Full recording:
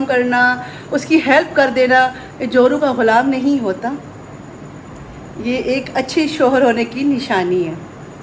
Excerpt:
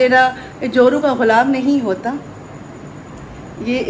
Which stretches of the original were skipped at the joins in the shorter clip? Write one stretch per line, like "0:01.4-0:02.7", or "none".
none